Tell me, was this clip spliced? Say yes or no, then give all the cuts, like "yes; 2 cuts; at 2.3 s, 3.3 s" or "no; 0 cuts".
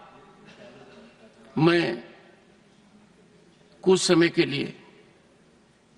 no; 0 cuts